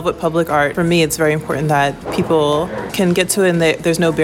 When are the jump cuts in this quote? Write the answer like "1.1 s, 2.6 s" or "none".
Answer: 2.1 s